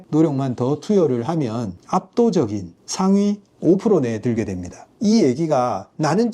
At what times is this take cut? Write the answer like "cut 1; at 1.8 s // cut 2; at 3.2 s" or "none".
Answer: cut 1; at 4.9 s

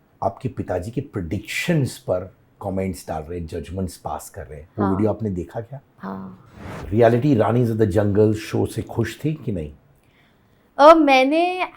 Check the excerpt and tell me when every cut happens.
cut 1; at 6.3 s

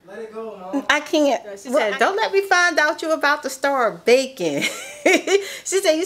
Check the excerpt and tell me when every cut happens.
cut 1; at 1.8 s

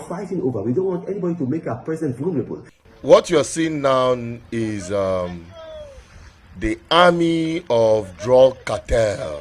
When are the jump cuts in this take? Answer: cut 1; at 2.7 s

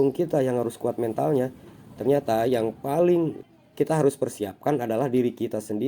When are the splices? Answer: cut 1; at 3.5 s

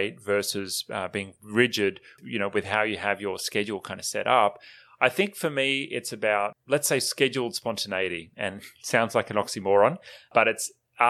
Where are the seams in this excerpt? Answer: cut 1; at 2.2 s // cut 2; at 6.6 s

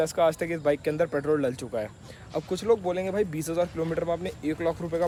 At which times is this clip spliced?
none

